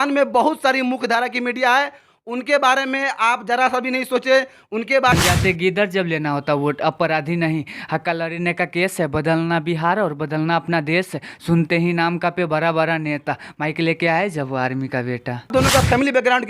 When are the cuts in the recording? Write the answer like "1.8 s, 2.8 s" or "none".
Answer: 5.1 s, 15.5 s